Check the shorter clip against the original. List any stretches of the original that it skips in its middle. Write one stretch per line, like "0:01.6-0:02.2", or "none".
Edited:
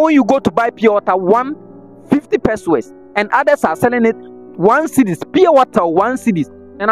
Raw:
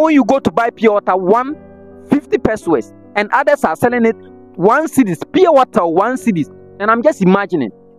none